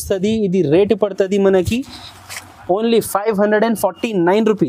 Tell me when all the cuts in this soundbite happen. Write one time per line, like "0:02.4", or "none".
none